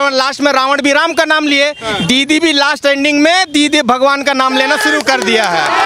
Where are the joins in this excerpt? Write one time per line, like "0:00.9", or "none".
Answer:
none